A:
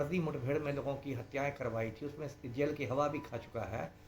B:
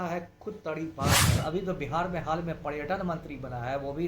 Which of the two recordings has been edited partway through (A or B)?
B